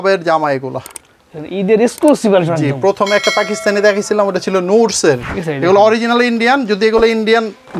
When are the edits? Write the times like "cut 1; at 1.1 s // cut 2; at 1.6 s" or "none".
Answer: cut 1; at 5.3 s